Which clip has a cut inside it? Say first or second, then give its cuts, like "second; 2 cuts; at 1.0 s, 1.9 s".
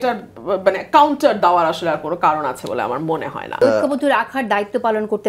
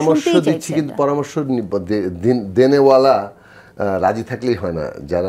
first; 1 cut; at 3.6 s